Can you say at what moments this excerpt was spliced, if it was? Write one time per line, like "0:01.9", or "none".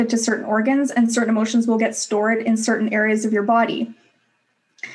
none